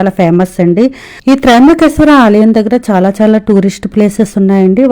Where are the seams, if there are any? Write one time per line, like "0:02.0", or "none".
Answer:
0:01.2